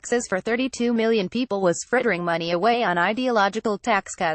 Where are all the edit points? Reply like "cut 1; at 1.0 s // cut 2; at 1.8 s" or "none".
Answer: none